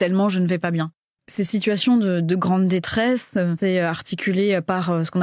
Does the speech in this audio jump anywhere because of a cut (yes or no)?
yes